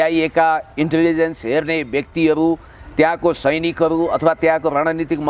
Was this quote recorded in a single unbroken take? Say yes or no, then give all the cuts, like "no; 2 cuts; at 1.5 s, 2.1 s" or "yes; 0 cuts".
yes; 0 cuts